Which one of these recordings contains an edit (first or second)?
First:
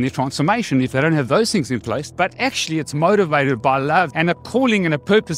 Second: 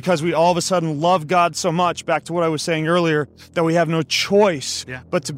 first